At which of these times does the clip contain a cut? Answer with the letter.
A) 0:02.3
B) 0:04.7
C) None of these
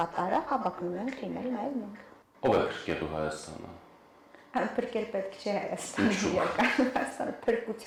C